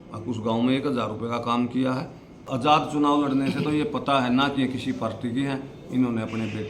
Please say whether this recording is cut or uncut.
cut